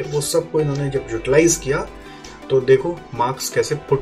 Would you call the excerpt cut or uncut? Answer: uncut